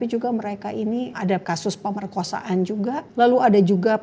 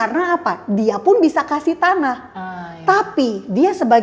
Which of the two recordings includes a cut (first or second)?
first